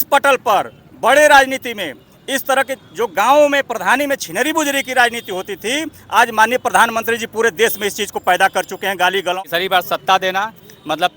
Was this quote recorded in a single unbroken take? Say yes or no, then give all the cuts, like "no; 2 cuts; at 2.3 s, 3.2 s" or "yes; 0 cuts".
no; 1 cut; at 9.4 s